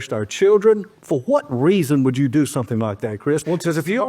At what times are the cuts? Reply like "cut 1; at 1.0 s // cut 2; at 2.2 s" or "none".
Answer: cut 1; at 0.9 s